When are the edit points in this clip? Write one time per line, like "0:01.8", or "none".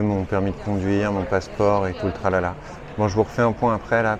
none